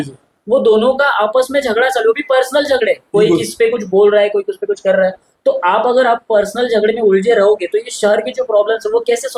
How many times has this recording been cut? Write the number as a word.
zero